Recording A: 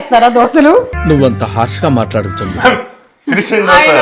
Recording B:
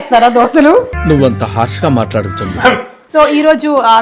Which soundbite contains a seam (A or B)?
B